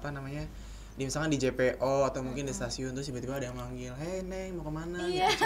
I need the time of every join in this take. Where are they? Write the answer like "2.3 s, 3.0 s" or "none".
none